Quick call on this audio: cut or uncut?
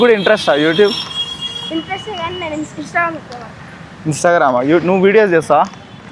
uncut